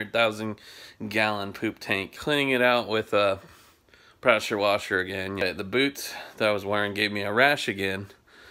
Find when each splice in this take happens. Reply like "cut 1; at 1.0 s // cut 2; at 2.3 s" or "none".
cut 1; at 2.2 s // cut 2; at 5.4 s